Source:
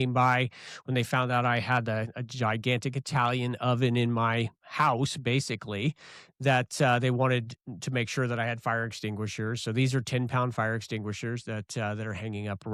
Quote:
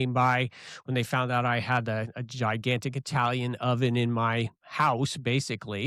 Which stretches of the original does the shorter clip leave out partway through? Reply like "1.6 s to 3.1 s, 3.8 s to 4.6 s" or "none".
none